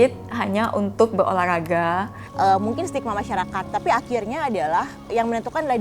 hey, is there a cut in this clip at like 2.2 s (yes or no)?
yes